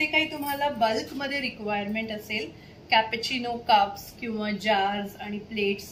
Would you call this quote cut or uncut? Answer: uncut